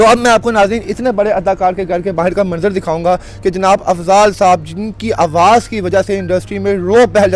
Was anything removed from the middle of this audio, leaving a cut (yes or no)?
no